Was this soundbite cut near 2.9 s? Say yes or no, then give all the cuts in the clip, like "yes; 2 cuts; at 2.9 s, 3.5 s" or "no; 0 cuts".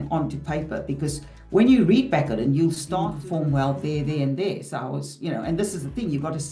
yes; 1 cut; at 2.9 s